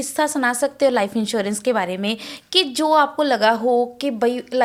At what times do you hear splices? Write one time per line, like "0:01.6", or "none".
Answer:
none